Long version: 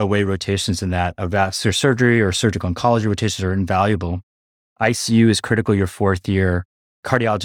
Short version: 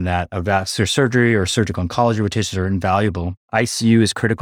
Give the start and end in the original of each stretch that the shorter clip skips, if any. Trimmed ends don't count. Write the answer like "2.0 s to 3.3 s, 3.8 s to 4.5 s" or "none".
4.2 s to 4.6 s